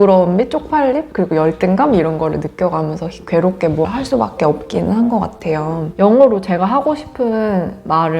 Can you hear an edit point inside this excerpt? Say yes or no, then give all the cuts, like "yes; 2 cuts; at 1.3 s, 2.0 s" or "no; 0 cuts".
yes; 2 cuts; at 3.9 s, 5.9 s